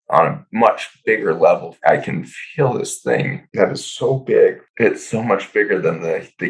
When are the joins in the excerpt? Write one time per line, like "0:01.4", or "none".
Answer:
0:01.7
0:03.4
0:04.6